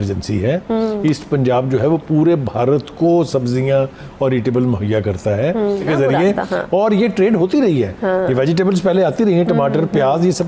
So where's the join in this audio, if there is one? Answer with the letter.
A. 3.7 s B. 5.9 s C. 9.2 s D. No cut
B